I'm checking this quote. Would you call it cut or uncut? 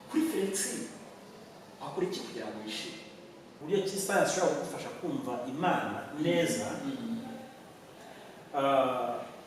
cut